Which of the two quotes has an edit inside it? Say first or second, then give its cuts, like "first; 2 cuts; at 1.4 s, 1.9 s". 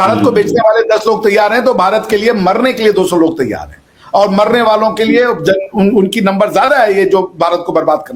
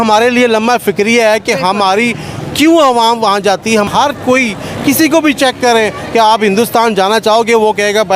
second; 1 cut; at 3.9 s